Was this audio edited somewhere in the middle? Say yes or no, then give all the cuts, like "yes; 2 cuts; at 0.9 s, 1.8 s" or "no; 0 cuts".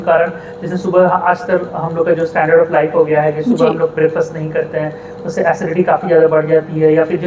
no; 0 cuts